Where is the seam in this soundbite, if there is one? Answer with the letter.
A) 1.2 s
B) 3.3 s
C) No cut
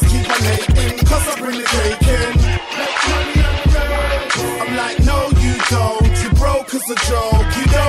B